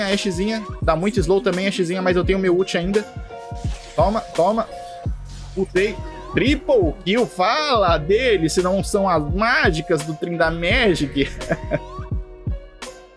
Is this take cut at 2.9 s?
no; 1 cut; at 12.2 s

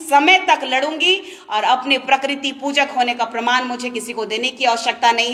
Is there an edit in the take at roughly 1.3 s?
no; 0 cuts

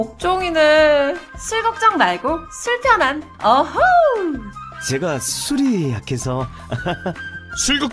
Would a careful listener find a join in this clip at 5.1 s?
no; 1 cut; at 1.2 s

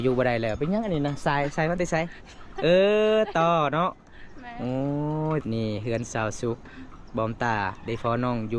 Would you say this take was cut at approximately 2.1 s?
no; 1 cut; at 5.4 s

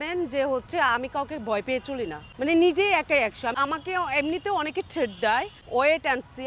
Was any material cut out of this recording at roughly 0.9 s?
no; 3 cuts; at 2.2 s, 3.6 s, 5.6 s

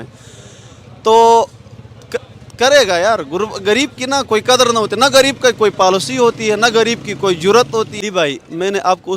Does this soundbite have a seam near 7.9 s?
yes; 1 cut; at 7.9 s

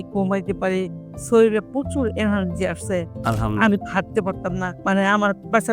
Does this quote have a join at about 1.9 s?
no; 1 cut; at 4.7 s

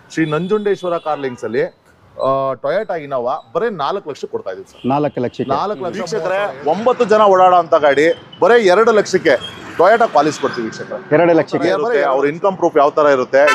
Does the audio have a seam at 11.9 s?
yes; 2 cuts; at 6.2 s, 11.9 s

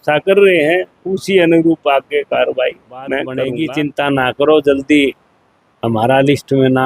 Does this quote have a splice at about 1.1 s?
no; 1 cut; at 3.4 s

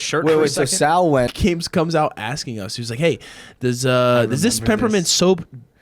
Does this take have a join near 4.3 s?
no; 1 cut; at 1.3 s

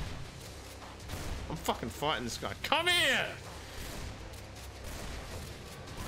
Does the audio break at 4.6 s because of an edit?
no; 0 cuts

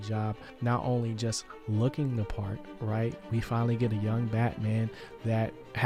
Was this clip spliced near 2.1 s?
no; 0 cuts

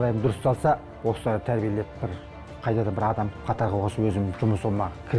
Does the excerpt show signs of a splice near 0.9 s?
yes; 1 cut; at 0.9 s

